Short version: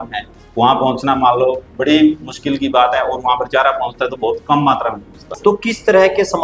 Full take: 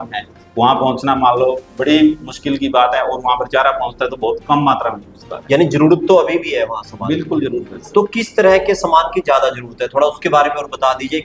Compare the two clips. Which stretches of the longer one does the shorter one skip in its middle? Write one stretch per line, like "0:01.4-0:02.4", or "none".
0:05.2-0:07.8